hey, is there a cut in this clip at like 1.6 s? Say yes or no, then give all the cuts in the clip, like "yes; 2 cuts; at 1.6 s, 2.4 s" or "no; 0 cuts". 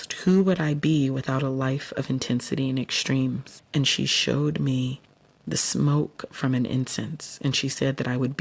no; 1 cut; at 3.5 s